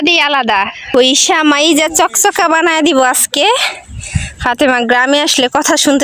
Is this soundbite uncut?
no; 1 cut; at 0.9 s

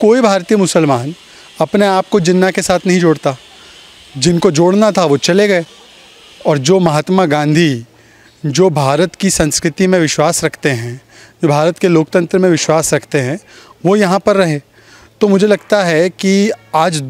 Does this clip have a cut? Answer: no; 0 cuts

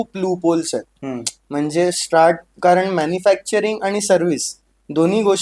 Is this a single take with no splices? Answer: yes; 0 cuts

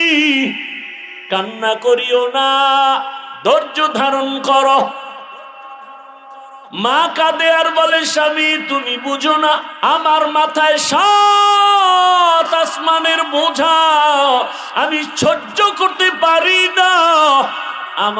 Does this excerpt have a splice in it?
yes; 2 cuts; at 6.7 s, 9.7 s

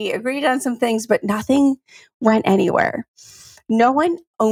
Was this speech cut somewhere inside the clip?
no; 0 cuts

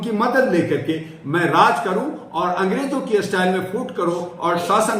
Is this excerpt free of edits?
yes; 0 cuts

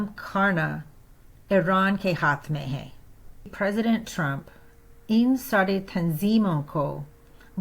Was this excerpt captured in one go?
no; 1 cut; at 3.5 s

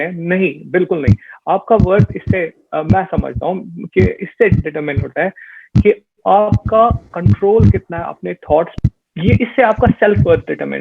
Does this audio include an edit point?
yes; 1 cut; at 8.7 s

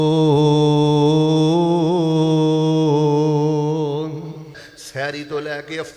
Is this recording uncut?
no; 1 cut; at 4.7 s

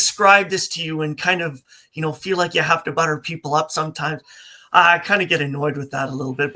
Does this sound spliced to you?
no; 0 cuts

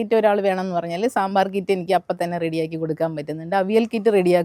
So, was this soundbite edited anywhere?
no; 0 cuts

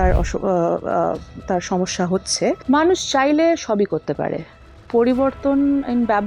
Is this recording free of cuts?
no; 1 cut; at 2.6 s

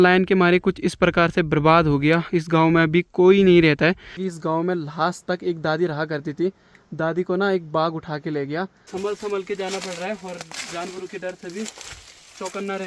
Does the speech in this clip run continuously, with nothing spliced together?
no; 2 cuts; at 4.1 s, 8.8 s

